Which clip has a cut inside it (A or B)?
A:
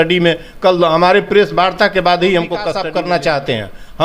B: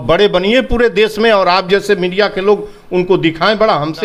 A